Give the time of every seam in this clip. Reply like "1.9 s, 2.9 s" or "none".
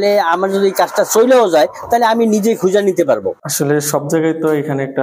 3.3 s